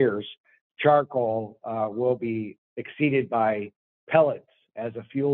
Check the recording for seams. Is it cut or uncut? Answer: cut